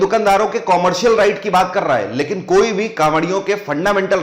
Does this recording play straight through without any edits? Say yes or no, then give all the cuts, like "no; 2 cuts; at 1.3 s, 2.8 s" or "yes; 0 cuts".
yes; 0 cuts